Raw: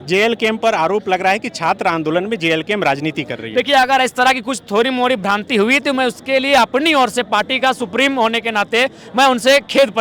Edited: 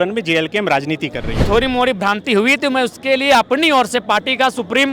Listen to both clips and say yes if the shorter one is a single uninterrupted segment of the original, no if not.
no